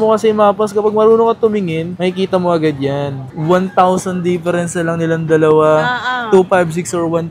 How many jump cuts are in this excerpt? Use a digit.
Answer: 1